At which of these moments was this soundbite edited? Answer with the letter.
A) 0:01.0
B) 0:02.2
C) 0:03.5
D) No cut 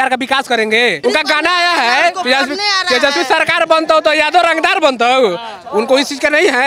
A